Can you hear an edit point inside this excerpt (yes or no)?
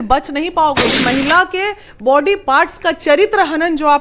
yes